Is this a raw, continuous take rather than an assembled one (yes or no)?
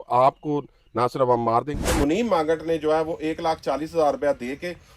no